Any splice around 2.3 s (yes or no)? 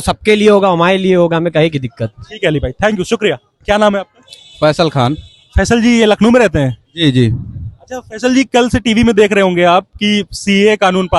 no